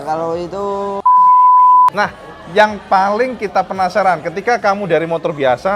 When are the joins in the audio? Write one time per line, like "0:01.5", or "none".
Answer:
0:01.0
0:01.9